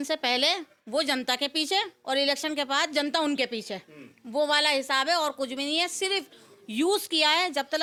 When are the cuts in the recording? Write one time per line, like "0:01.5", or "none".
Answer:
none